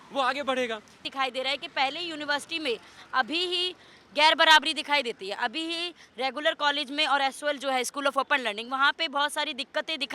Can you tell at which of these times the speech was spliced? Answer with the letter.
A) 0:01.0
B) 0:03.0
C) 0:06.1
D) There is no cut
A